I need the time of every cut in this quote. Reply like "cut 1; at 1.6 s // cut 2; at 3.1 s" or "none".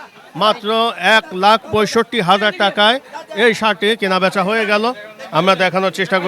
none